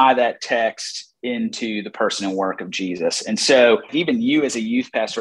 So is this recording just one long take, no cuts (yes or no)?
no